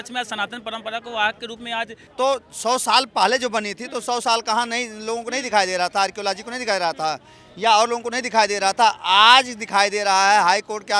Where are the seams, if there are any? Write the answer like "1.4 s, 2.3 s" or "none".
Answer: 2.0 s